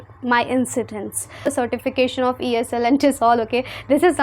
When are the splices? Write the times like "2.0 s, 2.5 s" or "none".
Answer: 1.5 s